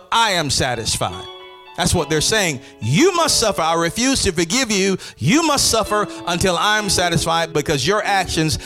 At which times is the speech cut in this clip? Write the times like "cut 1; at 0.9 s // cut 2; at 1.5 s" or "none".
cut 1; at 7.5 s